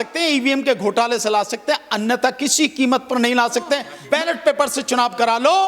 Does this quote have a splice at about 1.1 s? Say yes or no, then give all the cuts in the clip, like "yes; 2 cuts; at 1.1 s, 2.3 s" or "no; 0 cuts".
no; 1 cut; at 3.9 s